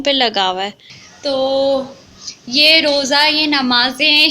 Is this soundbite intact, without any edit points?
no; 1 cut; at 0.9 s

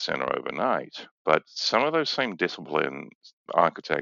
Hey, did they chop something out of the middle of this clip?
no; 0 cuts

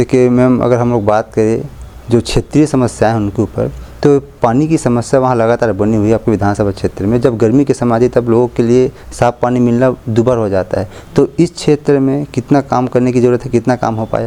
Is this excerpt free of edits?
yes; 0 cuts

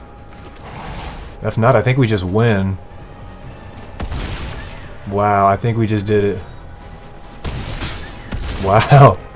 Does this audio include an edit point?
yes; 3 cuts; at 1.3 s, 2.9 s, 6.7 s

